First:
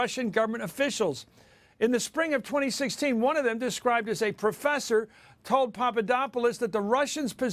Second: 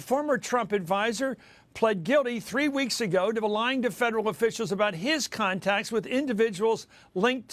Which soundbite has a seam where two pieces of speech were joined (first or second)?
second